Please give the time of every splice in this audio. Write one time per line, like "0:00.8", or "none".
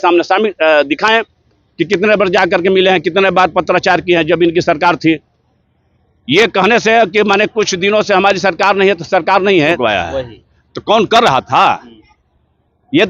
0:09.8